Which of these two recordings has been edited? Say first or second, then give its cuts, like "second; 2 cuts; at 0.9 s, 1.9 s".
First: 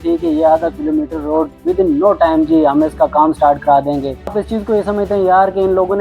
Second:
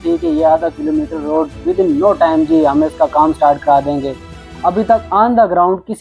first; 1 cut; at 4.4 s